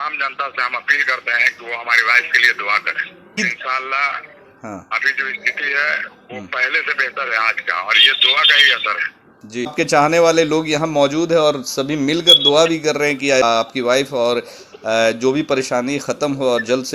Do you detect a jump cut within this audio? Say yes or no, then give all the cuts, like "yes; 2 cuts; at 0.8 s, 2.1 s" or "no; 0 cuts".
yes; 3 cuts; at 3.4 s, 9.7 s, 13.4 s